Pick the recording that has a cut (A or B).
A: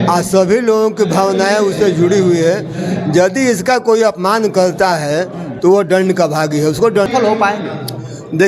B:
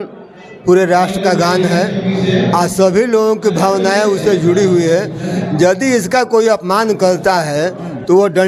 A